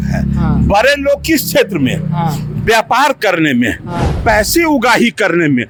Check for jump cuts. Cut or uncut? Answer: uncut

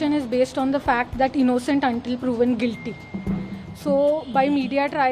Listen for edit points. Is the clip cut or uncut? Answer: uncut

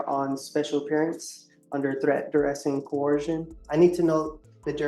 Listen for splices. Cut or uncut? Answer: cut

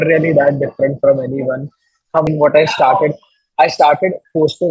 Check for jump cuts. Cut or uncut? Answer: cut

